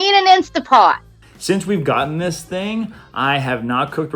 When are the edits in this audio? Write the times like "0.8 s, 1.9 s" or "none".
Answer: 1.1 s